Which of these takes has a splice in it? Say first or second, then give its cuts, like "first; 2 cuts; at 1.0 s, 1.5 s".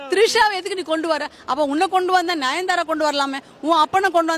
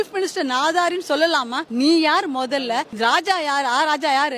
second; 2 cuts; at 1.6 s, 2.9 s